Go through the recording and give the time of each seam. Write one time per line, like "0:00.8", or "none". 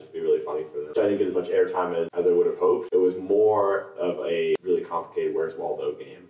0:00.9
0:02.1
0:02.9
0:04.6